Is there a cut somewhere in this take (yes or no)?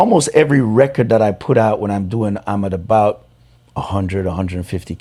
no